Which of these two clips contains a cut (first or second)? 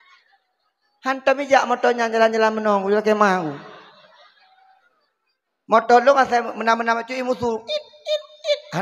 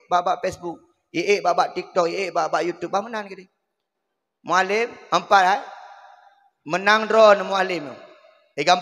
first